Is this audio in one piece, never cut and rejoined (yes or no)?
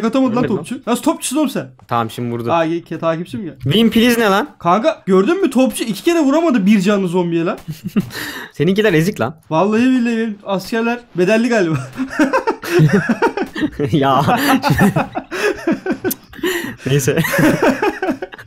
yes